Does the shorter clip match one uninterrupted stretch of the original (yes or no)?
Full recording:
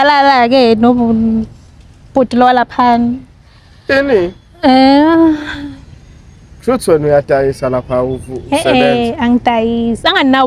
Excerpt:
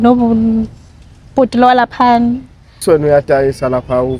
no